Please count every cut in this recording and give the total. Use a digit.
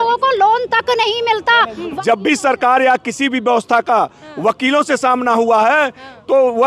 1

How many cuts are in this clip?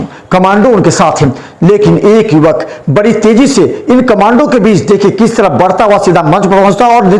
0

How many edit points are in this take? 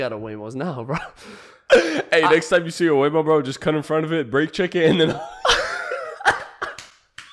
0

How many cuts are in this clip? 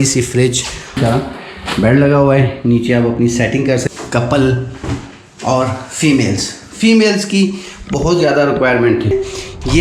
3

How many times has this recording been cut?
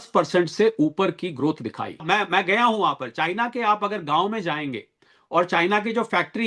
1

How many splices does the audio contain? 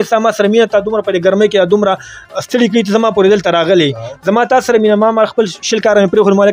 0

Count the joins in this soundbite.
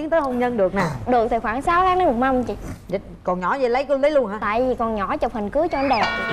0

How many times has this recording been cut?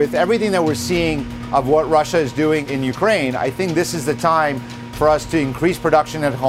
1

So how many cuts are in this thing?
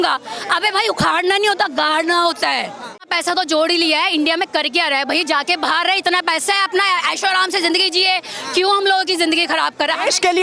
1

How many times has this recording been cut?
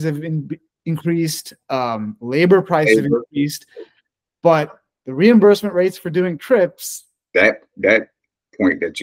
1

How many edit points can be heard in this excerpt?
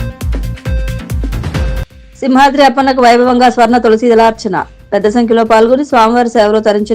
1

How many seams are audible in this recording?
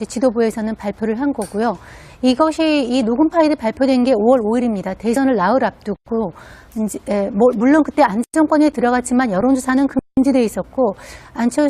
1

